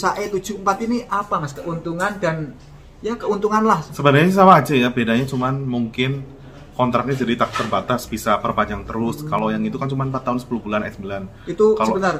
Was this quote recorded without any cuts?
yes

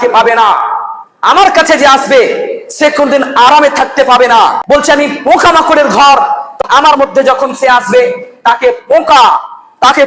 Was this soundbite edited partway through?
yes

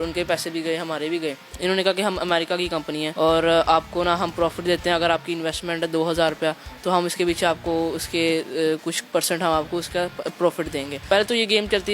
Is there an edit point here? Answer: yes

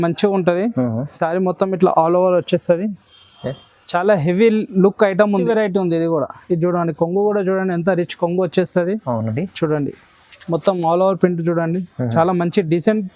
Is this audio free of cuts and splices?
no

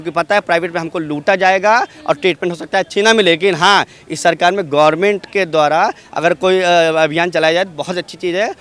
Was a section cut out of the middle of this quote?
no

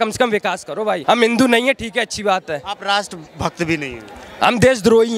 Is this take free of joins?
no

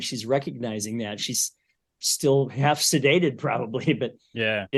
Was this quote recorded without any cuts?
yes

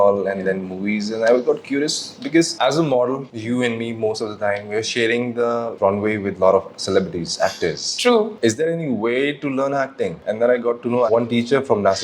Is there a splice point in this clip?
yes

